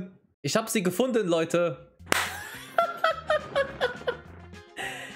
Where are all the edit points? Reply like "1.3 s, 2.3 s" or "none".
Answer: none